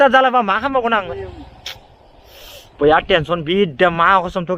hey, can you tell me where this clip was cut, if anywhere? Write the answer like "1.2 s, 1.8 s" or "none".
1.2 s